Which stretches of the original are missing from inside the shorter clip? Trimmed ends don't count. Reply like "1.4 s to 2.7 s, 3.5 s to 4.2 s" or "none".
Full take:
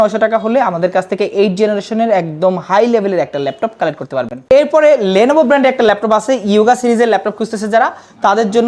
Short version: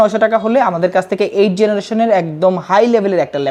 none